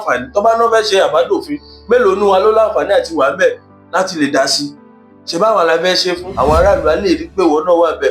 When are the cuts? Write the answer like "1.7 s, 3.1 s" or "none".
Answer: 6.3 s